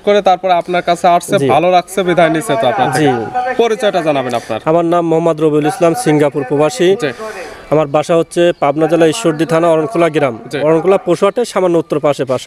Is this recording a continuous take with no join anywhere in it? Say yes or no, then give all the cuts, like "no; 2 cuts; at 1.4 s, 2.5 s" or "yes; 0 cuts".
yes; 0 cuts